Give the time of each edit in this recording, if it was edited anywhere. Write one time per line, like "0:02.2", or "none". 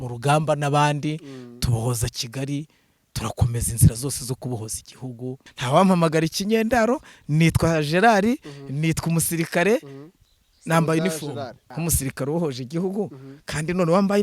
0:05.5
0:11.6